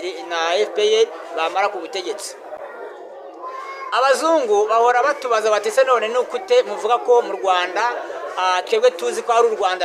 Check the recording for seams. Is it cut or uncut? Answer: uncut